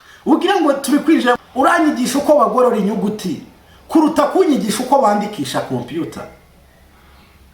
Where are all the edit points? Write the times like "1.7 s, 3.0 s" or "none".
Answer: 1.4 s